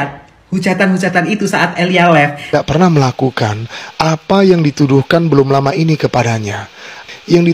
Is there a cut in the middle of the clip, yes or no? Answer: yes